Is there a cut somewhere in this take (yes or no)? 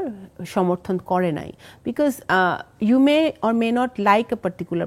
no